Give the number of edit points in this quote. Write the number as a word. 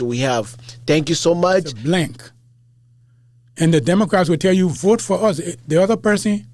one